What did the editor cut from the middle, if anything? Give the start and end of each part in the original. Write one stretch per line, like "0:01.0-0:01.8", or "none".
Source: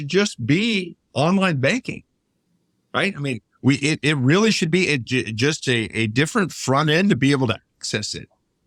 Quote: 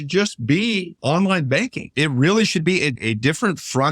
0:00.9-0:01.0
0:02.0-0:04.0
0:05.0-0:05.9